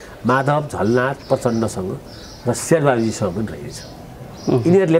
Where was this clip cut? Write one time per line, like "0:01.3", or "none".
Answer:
none